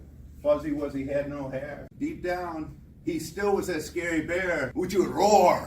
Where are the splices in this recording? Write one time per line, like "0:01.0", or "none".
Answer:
0:01.9
0:04.7

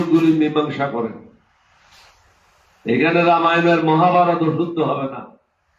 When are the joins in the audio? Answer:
none

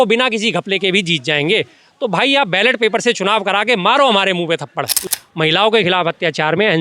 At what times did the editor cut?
0:05.0

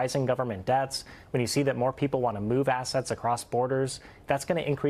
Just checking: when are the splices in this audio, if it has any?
none

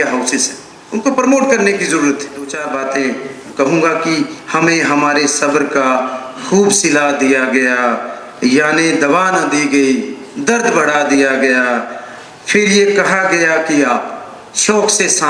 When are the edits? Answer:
0:02.6

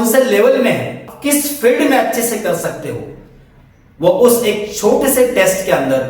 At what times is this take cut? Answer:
0:01.1

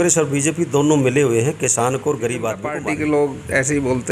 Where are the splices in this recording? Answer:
0:02.7

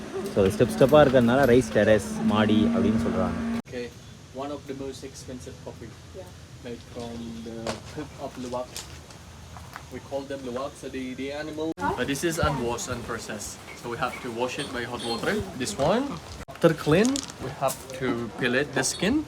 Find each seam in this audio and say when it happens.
0:03.6
0:11.8
0:16.6

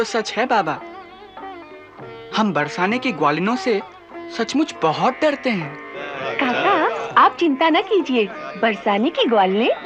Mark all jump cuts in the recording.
none

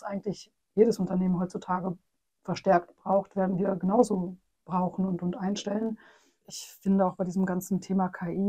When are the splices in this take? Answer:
0:06.5

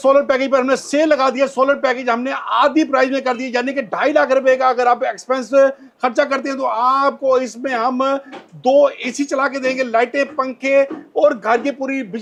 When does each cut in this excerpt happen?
none

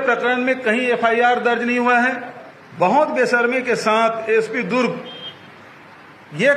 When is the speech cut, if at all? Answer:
none

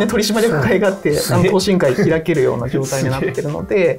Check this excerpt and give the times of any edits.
none

